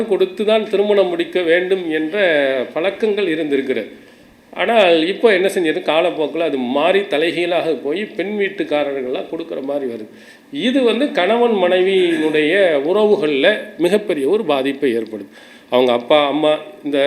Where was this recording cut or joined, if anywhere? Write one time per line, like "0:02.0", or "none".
none